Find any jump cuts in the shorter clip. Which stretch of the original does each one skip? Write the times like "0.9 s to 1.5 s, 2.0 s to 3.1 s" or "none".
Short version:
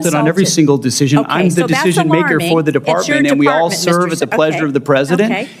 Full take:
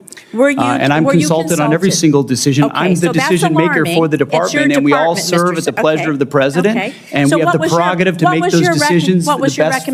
none